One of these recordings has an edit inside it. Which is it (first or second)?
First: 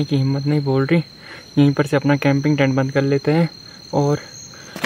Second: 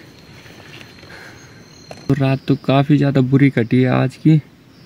second